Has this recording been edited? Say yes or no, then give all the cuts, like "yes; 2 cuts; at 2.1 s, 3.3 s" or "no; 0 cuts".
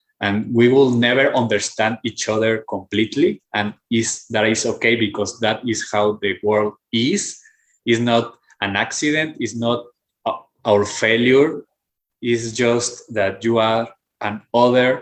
no; 0 cuts